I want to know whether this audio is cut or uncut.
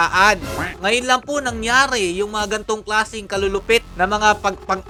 uncut